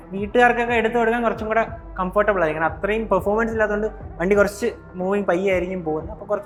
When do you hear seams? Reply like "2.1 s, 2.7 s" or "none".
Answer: none